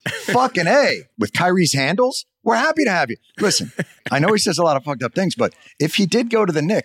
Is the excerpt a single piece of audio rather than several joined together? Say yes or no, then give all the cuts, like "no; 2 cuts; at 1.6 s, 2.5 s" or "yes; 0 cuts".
no; 1 cut; at 1.1 s